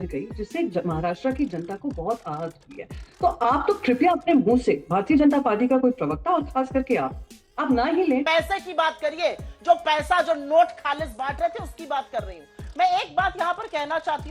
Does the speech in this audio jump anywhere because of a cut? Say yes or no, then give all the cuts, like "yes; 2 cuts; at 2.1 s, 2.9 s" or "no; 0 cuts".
yes; 1 cut; at 8.3 s